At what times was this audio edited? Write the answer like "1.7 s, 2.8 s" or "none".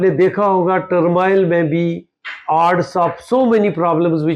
none